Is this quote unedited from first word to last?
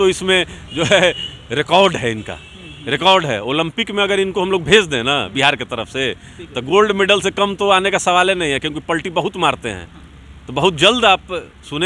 yes; 0 cuts

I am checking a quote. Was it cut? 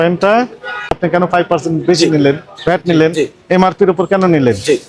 yes; 1 cut; at 0.9 s

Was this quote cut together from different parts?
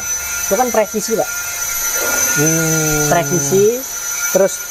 no; 0 cuts

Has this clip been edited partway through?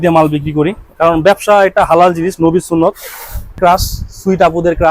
yes; 1 cut; at 3.6 s

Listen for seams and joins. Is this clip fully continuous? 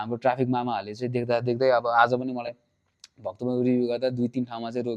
yes; 0 cuts

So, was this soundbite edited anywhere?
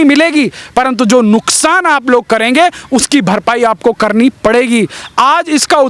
no; 0 cuts

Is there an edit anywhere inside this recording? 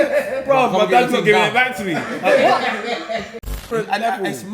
yes; 1 cut; at 3.4 s

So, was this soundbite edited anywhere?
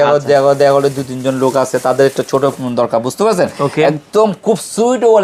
no; 0 cuts

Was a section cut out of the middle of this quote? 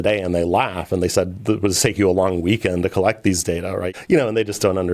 yes; 1 cut; at 3.9 s

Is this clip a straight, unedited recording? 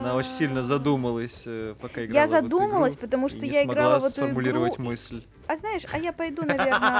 yes; 0 cuts

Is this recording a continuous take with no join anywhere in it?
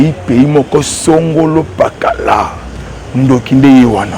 yes; 0 cuts

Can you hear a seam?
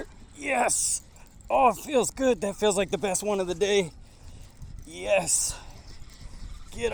no; 0 cuts

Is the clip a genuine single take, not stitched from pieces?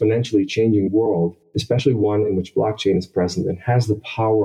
yes; 0 cuts

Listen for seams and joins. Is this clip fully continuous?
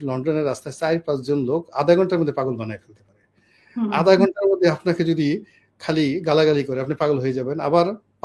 yes; 0 cuts

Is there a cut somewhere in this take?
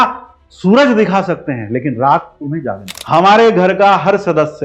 yes; 1 cut; at 2.9 s

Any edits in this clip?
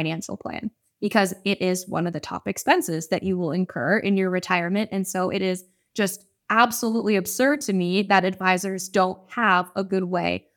no; 0 cuts

